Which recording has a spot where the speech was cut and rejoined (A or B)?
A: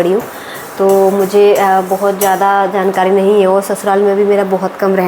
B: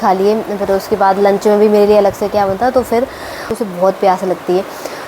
B